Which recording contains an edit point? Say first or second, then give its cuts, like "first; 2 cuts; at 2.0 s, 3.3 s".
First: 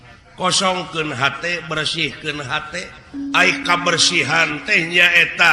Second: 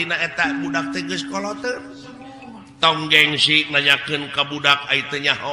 first; 1 cut; at 3.0 s